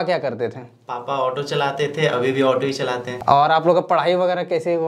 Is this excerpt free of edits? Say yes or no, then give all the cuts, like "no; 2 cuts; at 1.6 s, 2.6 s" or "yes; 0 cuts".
no; 1 cut; at 3.1 s